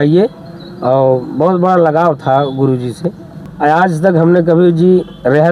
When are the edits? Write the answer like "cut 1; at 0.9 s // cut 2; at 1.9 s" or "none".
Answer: cut 1; at 3.5 s